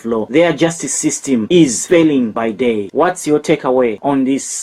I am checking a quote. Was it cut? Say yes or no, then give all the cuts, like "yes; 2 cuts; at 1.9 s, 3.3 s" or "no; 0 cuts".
no; 0 cuts